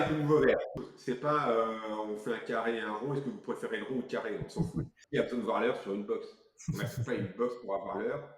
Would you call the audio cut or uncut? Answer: cut